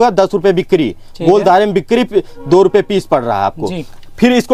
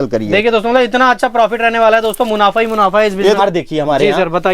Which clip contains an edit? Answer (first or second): second